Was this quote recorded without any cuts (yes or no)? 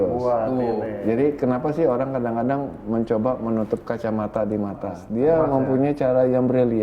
no